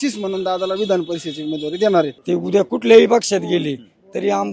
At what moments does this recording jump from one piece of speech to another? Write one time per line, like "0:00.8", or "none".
0:02.2